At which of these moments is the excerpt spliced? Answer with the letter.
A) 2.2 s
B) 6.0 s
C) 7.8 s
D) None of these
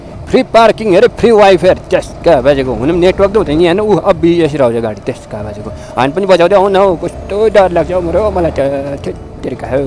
D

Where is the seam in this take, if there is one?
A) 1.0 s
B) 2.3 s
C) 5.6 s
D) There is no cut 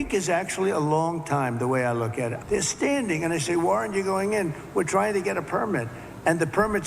B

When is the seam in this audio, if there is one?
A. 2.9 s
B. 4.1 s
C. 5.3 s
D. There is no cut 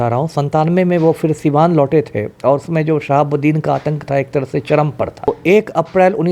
C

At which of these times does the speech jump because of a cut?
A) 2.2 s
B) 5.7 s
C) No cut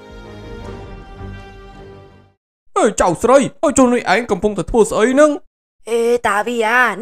A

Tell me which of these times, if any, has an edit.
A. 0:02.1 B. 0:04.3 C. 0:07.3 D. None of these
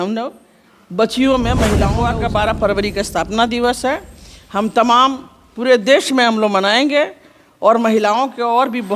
A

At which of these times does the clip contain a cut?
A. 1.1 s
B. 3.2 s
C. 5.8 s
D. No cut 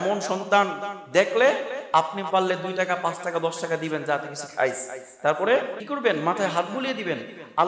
C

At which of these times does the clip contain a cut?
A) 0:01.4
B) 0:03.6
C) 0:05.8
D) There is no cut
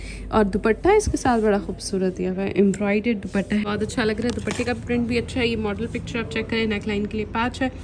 B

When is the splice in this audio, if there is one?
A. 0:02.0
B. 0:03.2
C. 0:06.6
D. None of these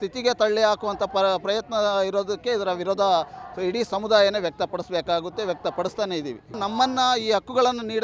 C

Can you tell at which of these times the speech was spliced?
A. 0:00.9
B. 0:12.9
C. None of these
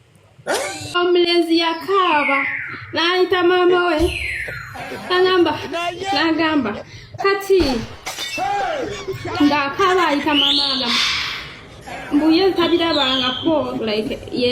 A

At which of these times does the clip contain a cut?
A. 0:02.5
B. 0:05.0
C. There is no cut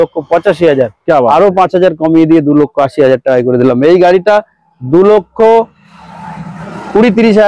C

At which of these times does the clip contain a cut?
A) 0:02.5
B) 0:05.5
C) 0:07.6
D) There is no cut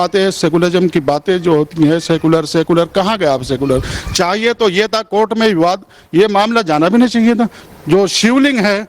C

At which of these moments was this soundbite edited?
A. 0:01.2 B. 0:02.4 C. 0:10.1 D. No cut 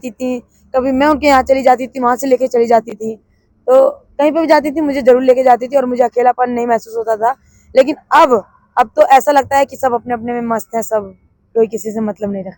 D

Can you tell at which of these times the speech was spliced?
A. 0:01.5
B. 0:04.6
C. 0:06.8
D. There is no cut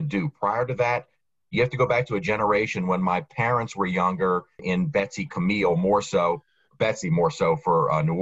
B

